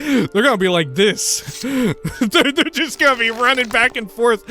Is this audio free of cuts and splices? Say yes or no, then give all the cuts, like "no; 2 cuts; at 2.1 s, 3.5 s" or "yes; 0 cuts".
no; 1 cut; at 2.0 s